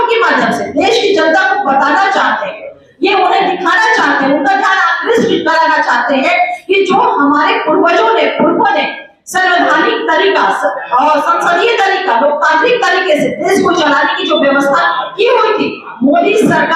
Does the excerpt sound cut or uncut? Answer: uncut